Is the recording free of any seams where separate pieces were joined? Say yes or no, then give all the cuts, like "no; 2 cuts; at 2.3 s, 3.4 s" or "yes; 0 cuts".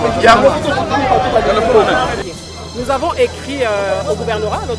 no; 1 cut; at 2.2 s